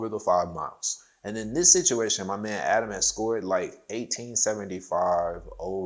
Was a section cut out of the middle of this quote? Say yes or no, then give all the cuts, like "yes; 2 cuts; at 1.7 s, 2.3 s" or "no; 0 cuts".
yes; 1 cut; at 1.1 s